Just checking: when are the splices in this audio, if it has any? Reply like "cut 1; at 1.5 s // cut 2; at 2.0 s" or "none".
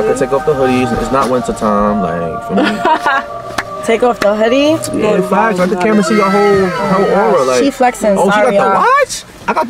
none